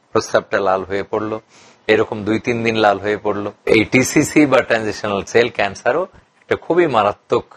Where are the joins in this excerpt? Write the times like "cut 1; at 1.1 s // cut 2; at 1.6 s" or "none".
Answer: cut 1; at 3.6 s // cut 2; at 5.3 s